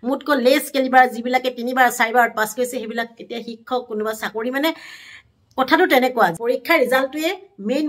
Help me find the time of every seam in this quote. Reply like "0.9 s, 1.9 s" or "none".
6.4 s

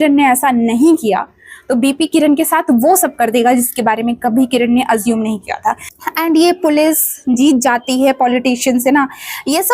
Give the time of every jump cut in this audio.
5.9 s

